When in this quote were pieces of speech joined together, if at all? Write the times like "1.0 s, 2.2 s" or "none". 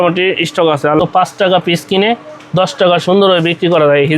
1.0 s